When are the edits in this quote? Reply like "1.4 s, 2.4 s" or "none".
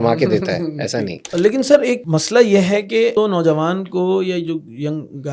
1.2 s, 2.0 s, 3.1 s